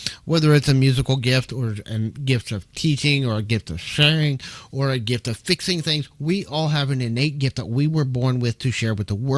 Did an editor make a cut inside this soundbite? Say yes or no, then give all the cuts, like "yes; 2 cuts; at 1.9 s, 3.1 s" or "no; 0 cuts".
no; 0 cuts